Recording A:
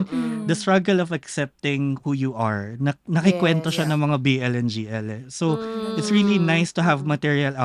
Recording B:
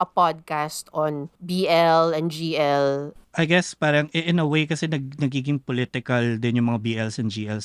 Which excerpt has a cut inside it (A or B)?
B